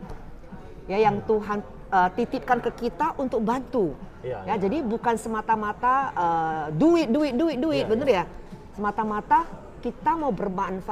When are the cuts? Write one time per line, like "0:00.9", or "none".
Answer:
none